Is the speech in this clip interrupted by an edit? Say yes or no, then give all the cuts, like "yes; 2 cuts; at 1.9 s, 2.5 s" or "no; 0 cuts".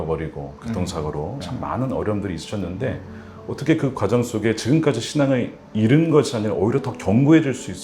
yes; 1 cut; at 1.4 s